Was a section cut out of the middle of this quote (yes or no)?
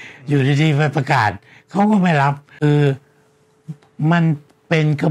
yes